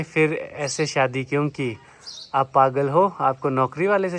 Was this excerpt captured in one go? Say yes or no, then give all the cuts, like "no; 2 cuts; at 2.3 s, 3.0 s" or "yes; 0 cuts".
yes; 0 cuts